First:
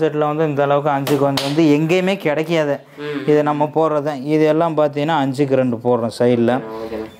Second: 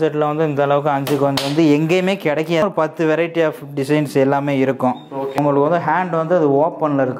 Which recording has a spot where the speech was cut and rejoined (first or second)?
second